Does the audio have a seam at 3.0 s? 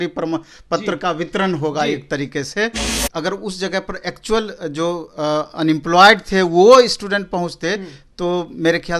yes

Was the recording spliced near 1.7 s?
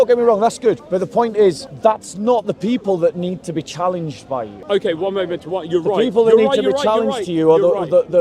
yes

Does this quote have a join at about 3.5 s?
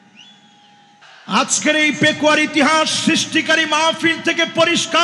no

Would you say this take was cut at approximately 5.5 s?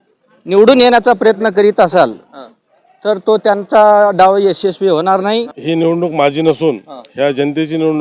yes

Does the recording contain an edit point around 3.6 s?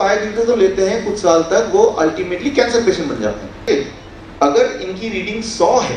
yes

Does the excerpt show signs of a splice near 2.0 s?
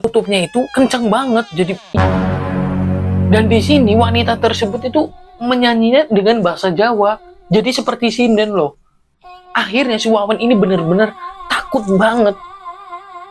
yes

